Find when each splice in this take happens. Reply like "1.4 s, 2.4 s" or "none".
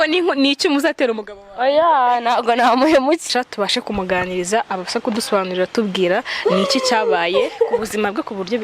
3.3 s